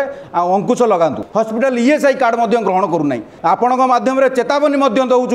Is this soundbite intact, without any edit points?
no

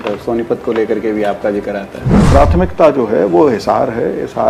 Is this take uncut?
no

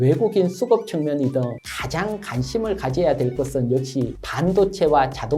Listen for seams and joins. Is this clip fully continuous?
yes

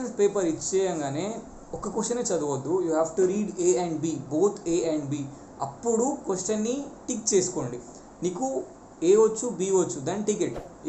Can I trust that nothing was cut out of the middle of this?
yes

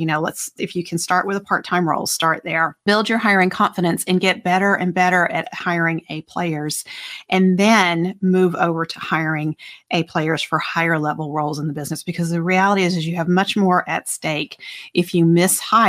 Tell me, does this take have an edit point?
yes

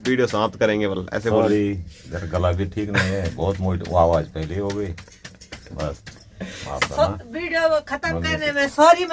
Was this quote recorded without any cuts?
yes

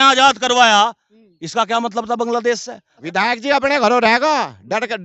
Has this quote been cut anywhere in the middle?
yes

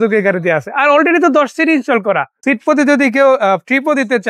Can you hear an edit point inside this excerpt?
yes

